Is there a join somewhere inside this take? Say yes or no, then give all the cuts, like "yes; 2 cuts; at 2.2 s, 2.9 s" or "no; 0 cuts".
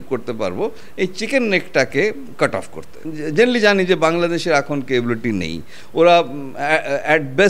yes; 1 cut; at 3.1 s